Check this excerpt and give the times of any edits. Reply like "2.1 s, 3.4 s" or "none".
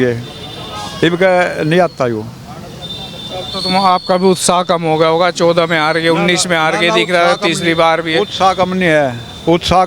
none